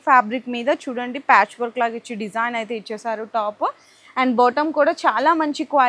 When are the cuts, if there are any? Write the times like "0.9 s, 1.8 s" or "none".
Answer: none